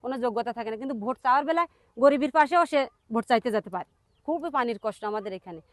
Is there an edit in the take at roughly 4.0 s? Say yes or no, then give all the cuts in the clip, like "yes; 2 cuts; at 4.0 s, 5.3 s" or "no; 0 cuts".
yes; 1 cut; at 4.0 s